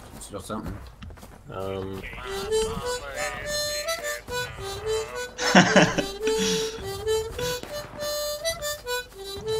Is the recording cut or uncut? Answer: cut